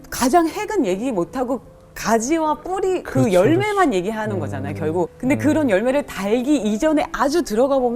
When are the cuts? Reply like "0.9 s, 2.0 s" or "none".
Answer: 5.1 s